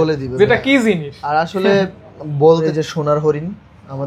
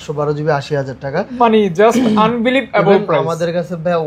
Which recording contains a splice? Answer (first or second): first